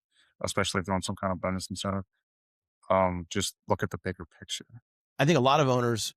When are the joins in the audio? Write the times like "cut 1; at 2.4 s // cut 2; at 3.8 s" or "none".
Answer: cut 1; at 5.0 s